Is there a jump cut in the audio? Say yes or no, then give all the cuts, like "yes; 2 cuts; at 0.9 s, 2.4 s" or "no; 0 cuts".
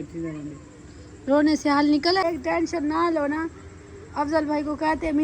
yes; 1 cut; at 2.2 s